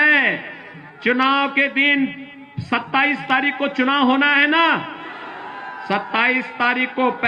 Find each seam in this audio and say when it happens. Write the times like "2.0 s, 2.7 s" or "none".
none